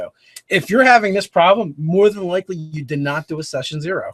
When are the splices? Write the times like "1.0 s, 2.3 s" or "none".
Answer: none